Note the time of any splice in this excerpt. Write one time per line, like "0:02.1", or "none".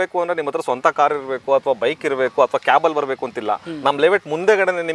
none